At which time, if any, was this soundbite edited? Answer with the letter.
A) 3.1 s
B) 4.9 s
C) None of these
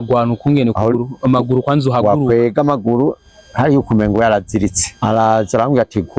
B